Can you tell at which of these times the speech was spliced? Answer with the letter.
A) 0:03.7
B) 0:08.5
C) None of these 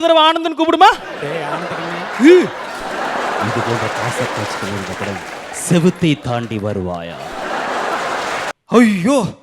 B